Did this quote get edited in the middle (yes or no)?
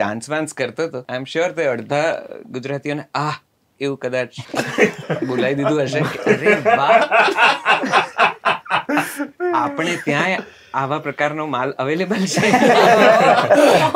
yes